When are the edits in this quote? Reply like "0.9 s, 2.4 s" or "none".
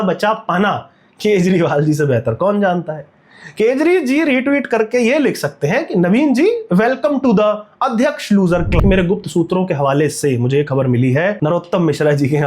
8.8 s, 11.4 s